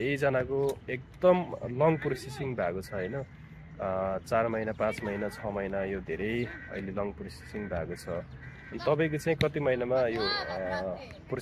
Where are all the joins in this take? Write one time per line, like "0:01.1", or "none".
none

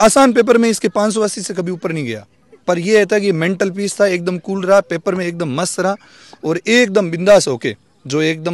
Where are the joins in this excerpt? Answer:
none

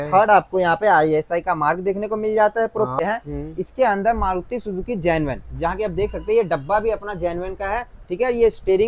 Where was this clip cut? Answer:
0:02.9

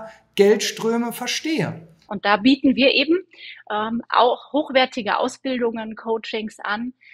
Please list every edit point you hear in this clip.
0:02.1

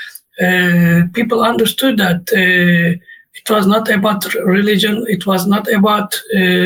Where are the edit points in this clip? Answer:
none

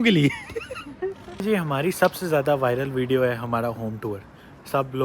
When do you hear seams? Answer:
0:01.3

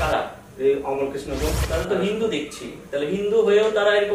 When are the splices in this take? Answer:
0:01.6

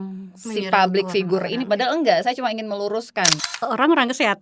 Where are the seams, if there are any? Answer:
0:03.4

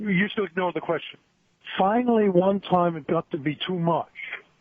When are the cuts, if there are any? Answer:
none

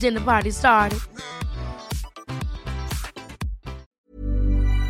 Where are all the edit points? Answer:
0:03.8

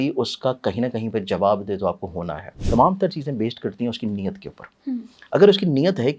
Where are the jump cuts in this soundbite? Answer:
0:02.5

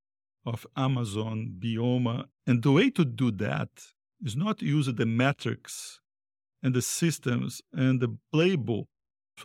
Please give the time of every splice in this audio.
none

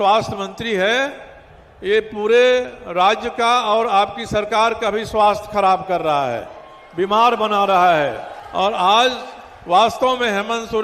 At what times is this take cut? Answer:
0:08.3

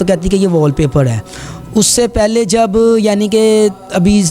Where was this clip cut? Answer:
none

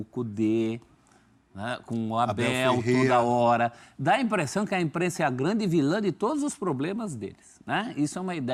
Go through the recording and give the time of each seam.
none

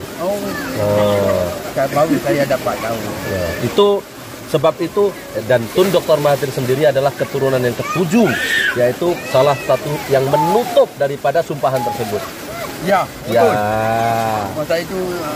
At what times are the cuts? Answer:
none

